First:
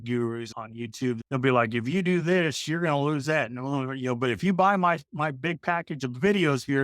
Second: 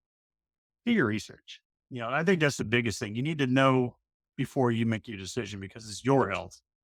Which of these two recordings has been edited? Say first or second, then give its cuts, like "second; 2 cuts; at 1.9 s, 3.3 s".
first; 1 cut; at 1.0 s